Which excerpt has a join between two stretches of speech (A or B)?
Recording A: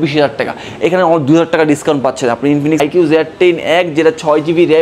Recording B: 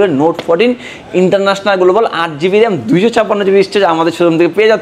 A